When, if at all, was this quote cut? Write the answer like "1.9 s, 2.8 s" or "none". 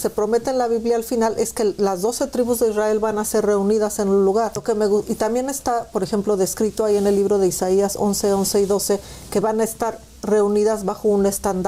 4.6 s